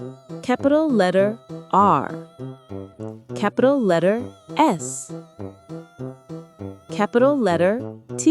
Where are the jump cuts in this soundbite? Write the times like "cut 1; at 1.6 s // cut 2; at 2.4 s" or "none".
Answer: cut 1; at 2.1 s // cut 2; at 3.4 s // cut 3; at 4.8 s // cut 4; at 7.0 s